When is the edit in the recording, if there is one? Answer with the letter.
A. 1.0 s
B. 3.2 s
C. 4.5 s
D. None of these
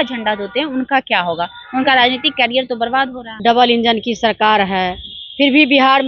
B